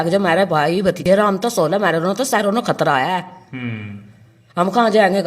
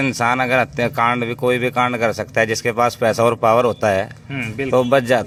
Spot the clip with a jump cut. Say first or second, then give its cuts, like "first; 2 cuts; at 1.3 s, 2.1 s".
first; 1 cut; at 1.0 s